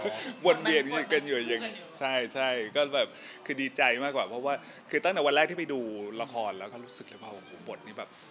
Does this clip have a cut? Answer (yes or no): no